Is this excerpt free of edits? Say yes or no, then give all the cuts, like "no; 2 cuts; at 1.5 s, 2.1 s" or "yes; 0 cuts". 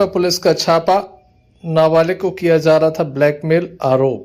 yes; 0 cuts